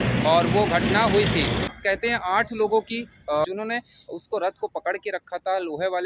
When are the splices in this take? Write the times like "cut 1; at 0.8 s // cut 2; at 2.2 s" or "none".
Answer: cut 1; at 1.7 s // cut 2; at 3.4 s